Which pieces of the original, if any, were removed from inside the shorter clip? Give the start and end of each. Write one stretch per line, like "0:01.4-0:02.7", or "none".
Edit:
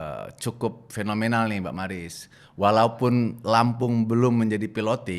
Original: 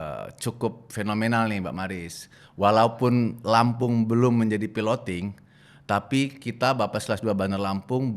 none